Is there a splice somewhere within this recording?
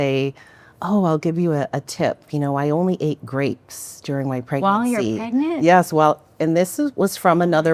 no; 0 cuts

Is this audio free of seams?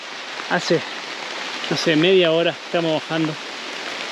yes; 0 cuts

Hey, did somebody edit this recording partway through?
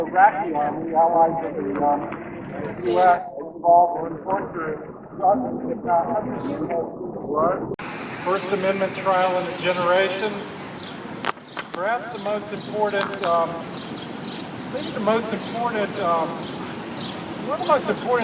yes; 1 cut; at 7.7 s

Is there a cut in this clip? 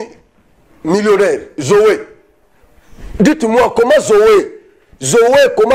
no; 0 cuts

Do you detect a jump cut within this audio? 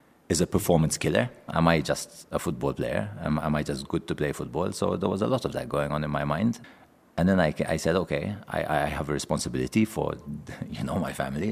yes; 2 cuts; at 1.5 s, 6.7 s

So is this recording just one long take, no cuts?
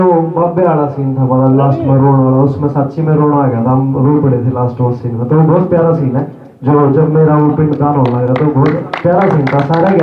yes; 0 cuts

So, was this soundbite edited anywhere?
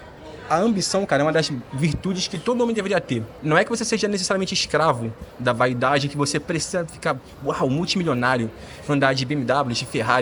no; 0 cuts

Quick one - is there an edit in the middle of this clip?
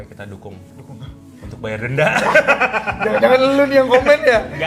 no; 0 cuts

